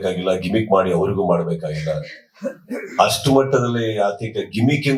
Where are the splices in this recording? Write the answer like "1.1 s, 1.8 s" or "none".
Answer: none